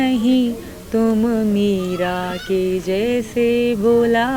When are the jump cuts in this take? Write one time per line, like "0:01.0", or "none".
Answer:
none